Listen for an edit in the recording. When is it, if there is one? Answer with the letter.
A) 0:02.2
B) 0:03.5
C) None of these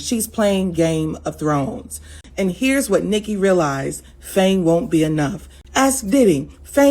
A